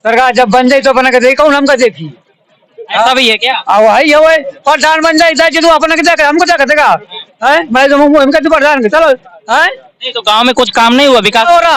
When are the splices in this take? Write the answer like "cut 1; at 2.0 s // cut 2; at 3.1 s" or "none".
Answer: cut 1; at 9.3 s